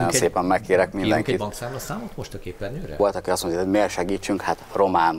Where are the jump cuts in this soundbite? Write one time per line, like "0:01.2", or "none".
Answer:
0:03.0